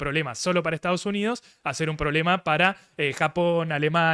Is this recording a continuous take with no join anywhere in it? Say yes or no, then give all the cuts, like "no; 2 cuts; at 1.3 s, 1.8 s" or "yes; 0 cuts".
yes; 0 cuts